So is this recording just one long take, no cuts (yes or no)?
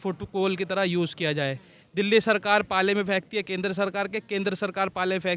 yes